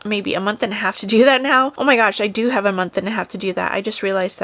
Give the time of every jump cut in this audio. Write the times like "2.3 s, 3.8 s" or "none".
none